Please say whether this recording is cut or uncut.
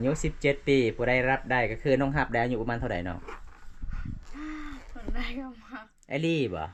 uncut